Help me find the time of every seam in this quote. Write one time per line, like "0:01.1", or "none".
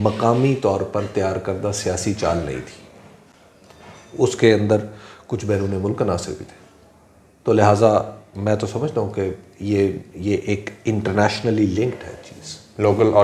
none